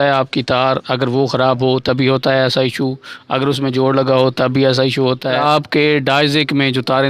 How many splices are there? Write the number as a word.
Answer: one